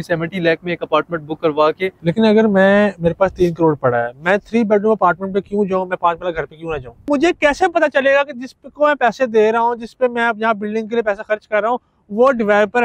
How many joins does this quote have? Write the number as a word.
two